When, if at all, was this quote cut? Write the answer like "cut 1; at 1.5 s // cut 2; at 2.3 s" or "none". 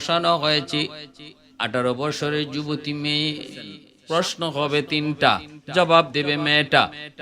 cut 1; at 3.9 s

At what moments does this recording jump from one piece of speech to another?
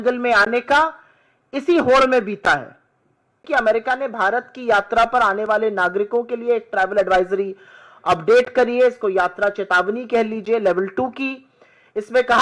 cut 1; at 3.4 s

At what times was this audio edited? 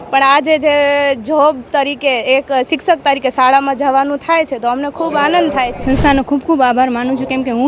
cut 1; at 5.7 s

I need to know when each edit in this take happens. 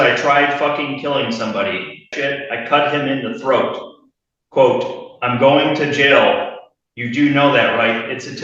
cut 1; at 2.1 s

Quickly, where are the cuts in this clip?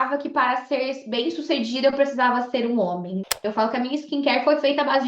cut 1; at 3.4 s

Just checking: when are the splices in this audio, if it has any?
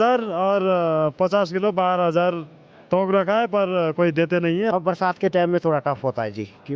cut 1; at 4.7 s

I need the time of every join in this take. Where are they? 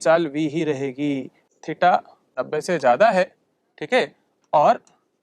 cut 1; at 1.6 s

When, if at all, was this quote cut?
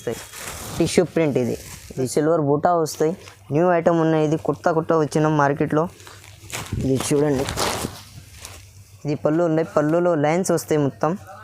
cut 1; at 2.1 s

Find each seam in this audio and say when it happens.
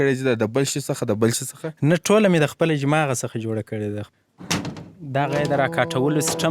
cut 1; at 4.1 s

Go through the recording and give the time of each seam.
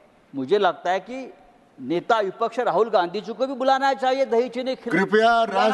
none

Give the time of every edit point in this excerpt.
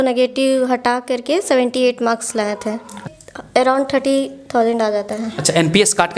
cut 1; at 3.1 s

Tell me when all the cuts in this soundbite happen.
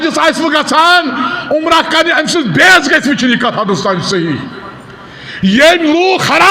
none

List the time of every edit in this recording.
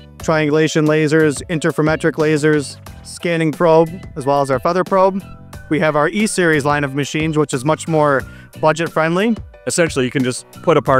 cut 1; at 9.5 s

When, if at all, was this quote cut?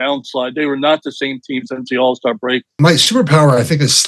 cut 1; at 2.8 s

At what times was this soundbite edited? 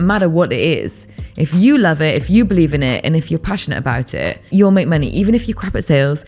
cut 1; at 4.5 s

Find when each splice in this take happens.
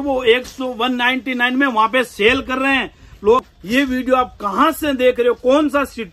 cut 1; at 3.4 s

